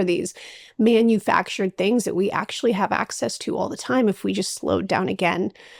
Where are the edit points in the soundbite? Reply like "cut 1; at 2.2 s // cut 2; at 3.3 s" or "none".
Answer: none